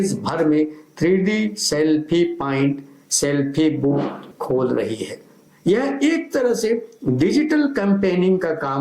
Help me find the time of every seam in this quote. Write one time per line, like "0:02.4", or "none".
0:04.3
0:05.5